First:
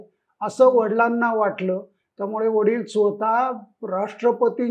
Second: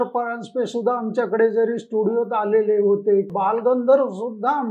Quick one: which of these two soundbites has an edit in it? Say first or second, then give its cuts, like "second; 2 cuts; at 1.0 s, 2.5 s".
second; 1 cut; at 3.3 s